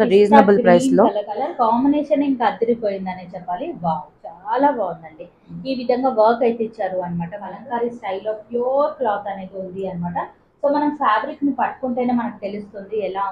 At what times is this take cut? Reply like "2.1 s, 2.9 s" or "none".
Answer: 1.5 s, 7.5 s